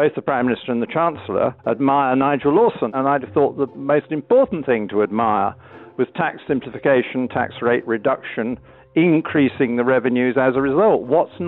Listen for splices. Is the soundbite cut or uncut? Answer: cut